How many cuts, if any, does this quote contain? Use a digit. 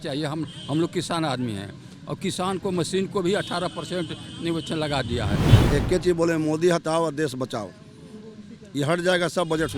1